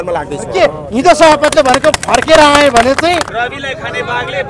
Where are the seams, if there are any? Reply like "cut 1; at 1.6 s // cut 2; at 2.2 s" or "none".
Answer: cut 1; at 3.3 s